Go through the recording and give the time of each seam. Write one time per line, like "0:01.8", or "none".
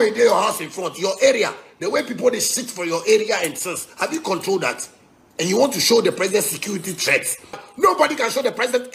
none